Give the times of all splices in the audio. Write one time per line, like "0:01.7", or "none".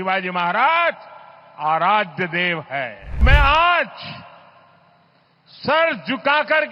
0:03.2